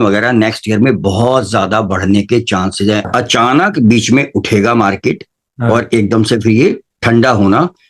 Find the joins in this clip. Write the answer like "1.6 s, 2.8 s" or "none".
3.1 s